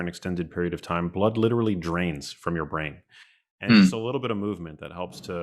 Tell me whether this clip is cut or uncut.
uncut